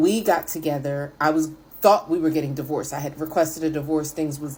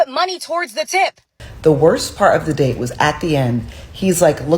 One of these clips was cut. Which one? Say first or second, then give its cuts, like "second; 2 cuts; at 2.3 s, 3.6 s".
second; 1 cut; at 1.4 s